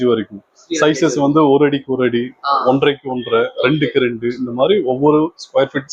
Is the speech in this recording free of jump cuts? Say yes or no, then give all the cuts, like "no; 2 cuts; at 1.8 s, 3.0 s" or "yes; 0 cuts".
yes; 0 cuts